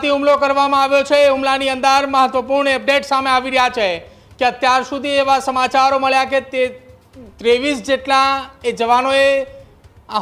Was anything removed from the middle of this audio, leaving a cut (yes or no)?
no